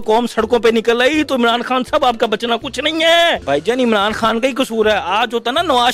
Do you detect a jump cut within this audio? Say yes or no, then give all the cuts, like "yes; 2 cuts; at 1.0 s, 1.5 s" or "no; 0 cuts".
yes; 1 cut; at 3.4 s